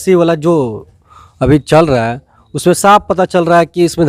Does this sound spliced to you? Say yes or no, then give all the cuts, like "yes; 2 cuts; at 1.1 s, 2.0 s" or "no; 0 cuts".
no; 0 cuts